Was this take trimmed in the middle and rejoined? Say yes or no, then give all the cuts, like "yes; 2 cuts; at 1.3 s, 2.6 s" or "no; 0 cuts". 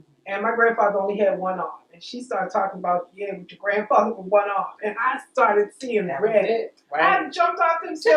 no; 0 cuts